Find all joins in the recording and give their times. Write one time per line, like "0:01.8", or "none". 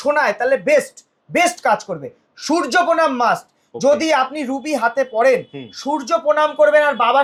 none